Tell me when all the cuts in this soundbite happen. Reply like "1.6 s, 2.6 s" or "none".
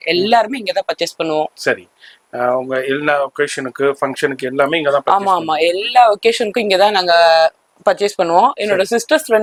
none

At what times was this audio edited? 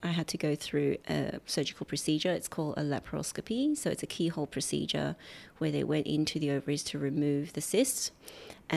1.0 s

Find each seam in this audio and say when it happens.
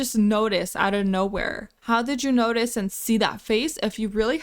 1.7 s

